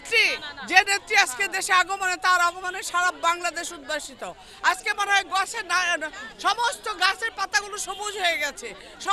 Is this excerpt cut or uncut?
uncut